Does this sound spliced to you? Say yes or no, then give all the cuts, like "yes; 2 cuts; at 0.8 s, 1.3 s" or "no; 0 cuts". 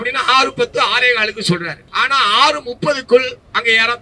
yes; 1 cut; at 1.8 s